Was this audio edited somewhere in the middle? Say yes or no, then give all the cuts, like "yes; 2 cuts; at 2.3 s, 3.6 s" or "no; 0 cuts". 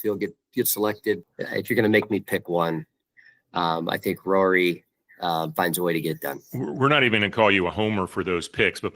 yes; 1 cut; at 1.3 s